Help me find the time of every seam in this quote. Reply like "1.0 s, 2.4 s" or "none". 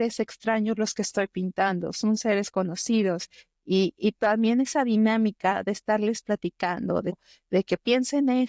7.2 s